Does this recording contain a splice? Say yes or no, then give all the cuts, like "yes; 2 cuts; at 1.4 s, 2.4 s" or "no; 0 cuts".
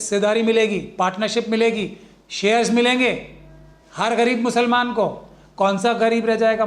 no; 0 cuts